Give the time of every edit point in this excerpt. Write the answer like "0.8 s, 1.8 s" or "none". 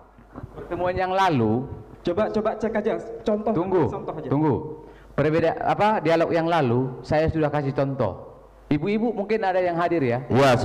none